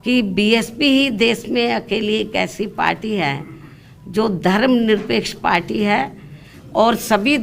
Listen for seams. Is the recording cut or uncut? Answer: uncut